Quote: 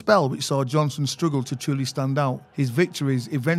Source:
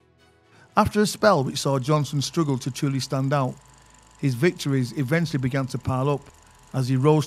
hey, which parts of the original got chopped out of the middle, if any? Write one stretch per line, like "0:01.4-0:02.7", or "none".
0:03.6-0:04.1